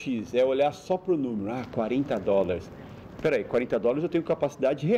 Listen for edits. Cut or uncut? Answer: uncut